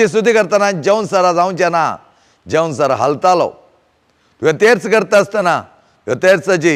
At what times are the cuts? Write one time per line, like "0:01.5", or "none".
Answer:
none

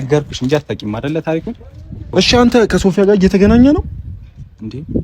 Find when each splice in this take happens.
0:02.1

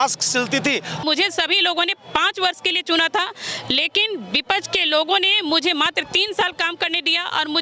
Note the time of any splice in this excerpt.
0:00.9

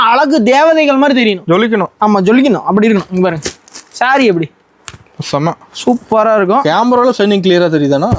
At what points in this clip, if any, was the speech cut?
none

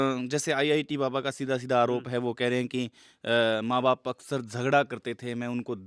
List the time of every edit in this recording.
none

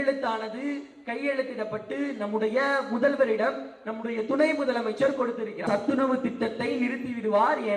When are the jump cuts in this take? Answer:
0:05.6

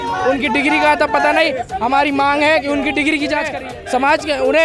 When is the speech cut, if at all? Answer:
0:03.6

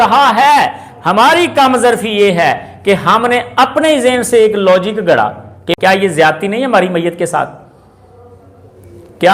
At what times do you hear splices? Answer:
0:05.7

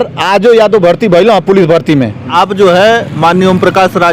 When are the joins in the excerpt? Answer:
0:02.3

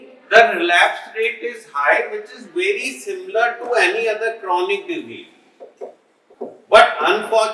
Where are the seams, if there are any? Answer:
0:06.2

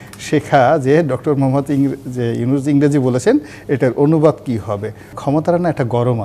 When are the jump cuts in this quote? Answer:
0:05.2

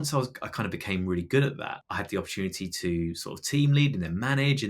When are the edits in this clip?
0:01.8

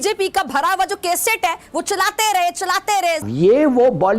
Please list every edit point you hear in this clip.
0:03.2

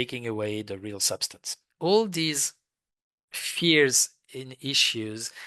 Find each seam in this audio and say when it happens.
0:01.6

